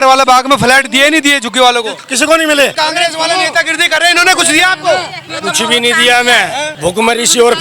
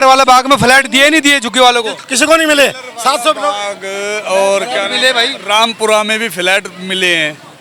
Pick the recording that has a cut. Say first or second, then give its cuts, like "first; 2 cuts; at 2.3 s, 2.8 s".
first; 3 cuts; at 2.8 s, 5.3 s, 6.7 s